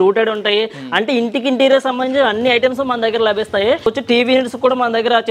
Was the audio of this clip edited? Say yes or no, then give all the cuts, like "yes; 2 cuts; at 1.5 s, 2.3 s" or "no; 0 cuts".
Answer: yes; 1 cut; at 3.9 s